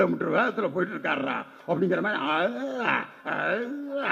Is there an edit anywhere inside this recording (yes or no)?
no